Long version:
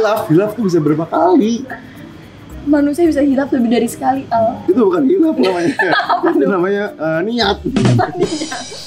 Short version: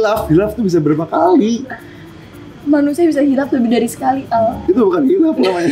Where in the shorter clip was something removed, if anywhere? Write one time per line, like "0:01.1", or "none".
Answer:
none

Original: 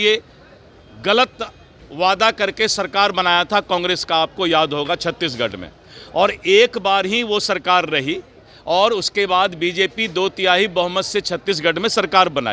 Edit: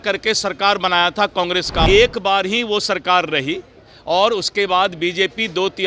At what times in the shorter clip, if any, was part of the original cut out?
0:01.9

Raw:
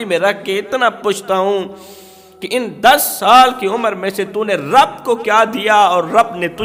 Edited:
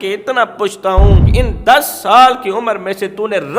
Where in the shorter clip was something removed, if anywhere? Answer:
0:01.2

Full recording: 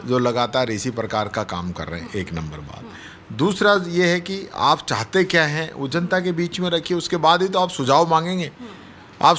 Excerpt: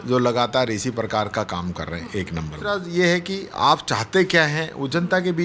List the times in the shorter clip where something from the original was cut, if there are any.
0:02.8

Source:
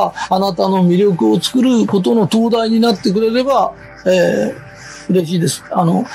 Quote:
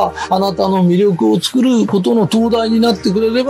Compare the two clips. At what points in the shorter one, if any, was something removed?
none

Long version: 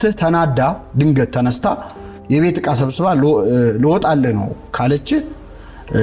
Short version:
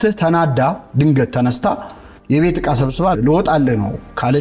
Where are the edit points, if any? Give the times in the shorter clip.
0:03.2

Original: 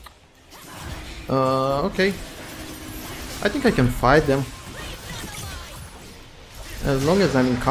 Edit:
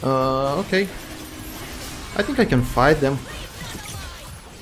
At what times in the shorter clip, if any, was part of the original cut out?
0:03.2

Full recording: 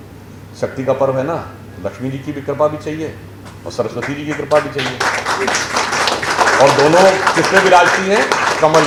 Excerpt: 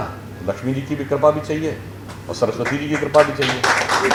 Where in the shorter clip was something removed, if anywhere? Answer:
none

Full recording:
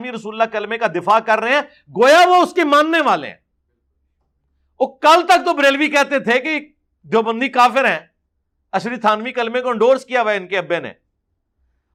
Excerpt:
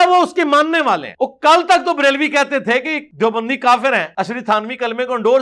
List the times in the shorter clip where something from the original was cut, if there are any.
0:01.1
0:03.0
0:04.1

